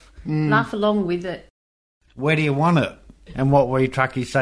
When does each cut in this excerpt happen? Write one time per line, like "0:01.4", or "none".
0:01.5